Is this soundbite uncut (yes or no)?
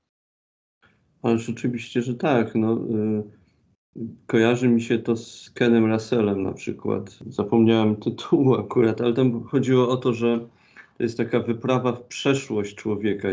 yes